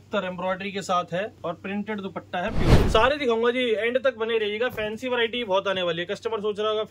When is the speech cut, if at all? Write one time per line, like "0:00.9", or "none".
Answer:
0:01.3
0:02.8